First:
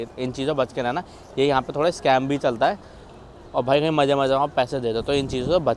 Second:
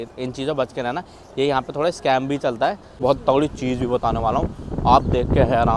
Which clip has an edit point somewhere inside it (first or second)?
second